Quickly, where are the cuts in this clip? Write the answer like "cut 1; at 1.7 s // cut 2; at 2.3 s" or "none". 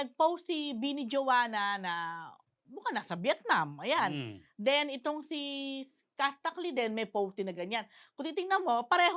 none